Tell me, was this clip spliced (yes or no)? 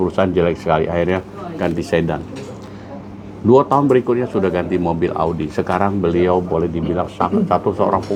no